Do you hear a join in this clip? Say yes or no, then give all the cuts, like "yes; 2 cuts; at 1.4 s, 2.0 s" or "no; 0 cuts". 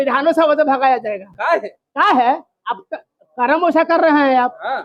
no; 0 cuts